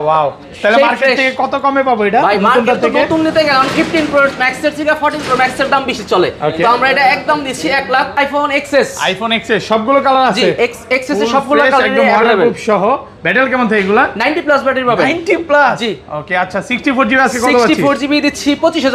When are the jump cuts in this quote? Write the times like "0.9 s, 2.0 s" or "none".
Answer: 8.2 s